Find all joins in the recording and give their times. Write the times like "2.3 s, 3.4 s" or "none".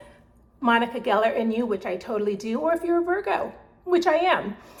none